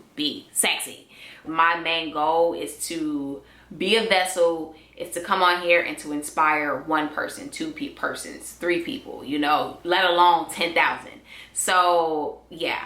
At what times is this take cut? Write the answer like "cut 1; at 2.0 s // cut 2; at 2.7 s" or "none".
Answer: cut 1; at 1.4 s

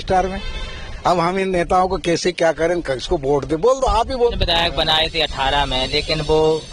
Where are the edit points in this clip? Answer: cut 1; at 4.3 s

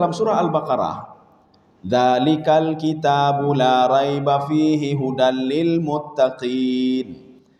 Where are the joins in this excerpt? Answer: none

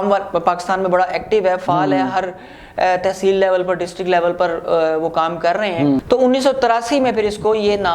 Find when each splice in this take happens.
cut 1; at 6.0 s

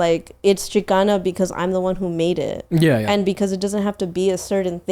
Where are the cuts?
cut 1; at 3.4 s

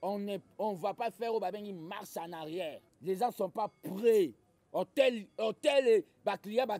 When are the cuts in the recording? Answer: cut 1; at 2.9 s

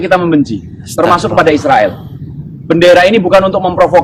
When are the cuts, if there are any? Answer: none

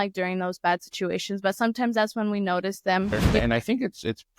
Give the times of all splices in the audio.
cut 1; at 3.4 s

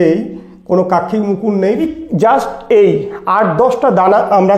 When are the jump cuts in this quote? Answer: cut 1; at 1.8 s

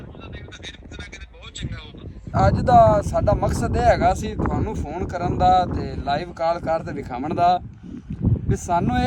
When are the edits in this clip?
cut 1; at 2.3 s

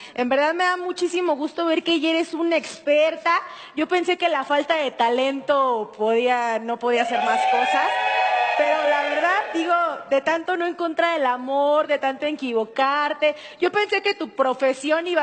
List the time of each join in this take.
cut 1; at 5.9 s

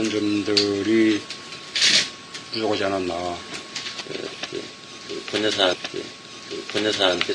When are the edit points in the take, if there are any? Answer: cut 1; at 1.5 s

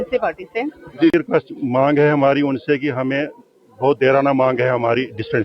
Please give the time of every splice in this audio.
cut 1; at 1.1 s

